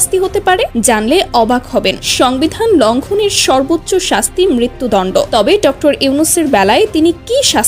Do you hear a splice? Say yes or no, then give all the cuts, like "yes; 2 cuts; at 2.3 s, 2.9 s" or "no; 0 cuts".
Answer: no; 0 cuts